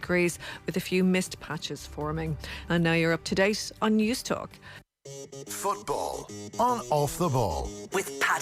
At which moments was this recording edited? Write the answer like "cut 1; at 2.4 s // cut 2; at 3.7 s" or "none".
cut 1; at 4.9 s